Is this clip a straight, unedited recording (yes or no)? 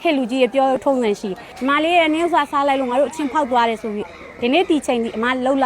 no